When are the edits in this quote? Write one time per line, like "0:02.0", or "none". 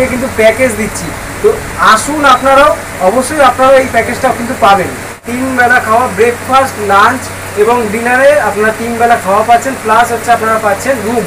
0:05.3